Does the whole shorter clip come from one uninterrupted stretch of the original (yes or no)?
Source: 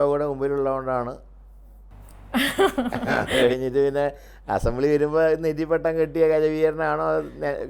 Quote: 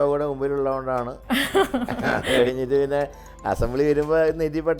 no